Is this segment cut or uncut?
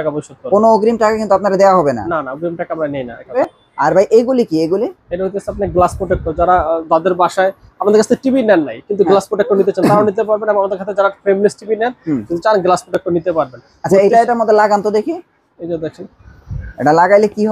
cut